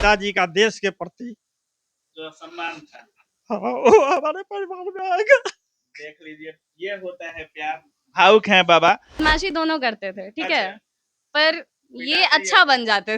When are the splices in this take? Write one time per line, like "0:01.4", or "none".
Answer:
0:09.2